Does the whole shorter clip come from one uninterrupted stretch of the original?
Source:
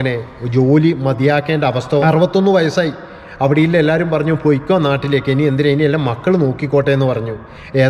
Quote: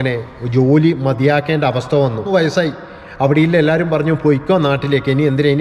no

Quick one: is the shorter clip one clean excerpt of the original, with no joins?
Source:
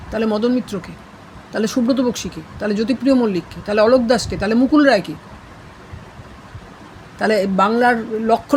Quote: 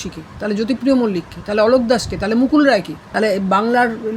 no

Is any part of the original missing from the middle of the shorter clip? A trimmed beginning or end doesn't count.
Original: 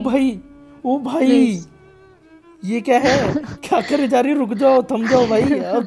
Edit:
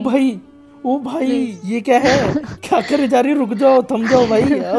yes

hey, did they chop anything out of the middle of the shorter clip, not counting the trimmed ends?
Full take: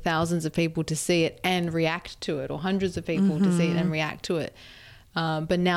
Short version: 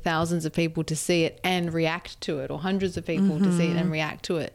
no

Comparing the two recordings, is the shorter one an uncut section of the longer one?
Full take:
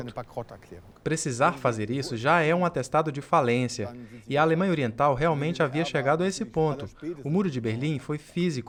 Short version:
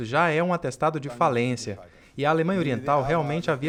yes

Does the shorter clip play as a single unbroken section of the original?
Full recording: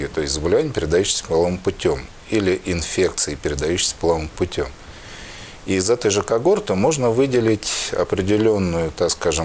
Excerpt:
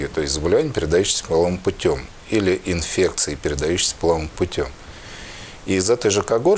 yes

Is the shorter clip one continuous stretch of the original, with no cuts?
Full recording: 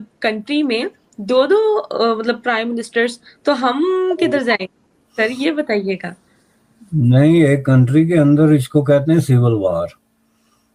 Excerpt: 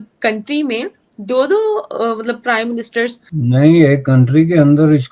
no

